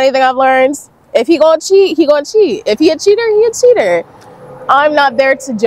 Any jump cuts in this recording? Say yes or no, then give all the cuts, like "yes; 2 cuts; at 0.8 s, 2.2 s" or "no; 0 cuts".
no; 0 cuts